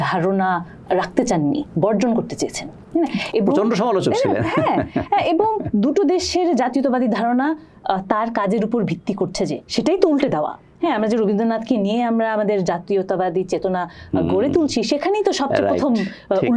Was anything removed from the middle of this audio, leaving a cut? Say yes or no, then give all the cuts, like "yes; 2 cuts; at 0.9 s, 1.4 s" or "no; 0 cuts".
no; 0 cuts